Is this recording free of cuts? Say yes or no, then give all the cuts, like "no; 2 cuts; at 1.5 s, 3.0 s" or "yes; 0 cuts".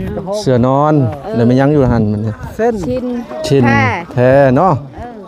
yes; 0 cuts